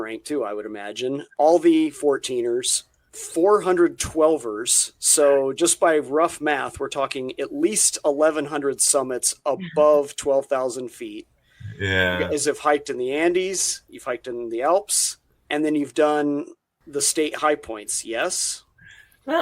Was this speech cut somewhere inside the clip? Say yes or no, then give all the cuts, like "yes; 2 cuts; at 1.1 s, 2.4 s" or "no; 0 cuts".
yes; 1 cut; at 15.4 s